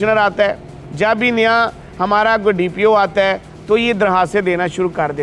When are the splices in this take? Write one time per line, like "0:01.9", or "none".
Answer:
none